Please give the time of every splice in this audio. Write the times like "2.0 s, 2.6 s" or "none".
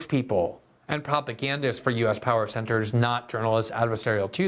none